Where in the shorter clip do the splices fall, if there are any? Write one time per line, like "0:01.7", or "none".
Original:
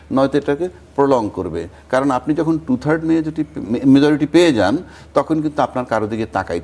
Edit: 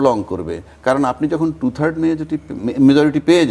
none